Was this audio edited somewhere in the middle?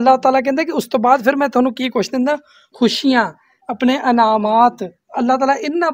no; 0 cuts

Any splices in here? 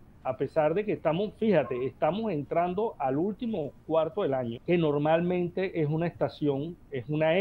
yes; 1 cut; at 4.6 s

